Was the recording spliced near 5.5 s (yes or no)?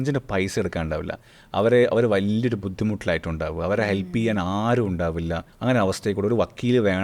yes